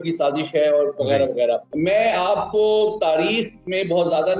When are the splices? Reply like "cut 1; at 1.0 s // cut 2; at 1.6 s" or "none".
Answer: cut 1; at 1.7 s